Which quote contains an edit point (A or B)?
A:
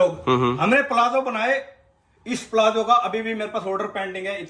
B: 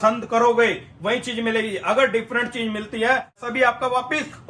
B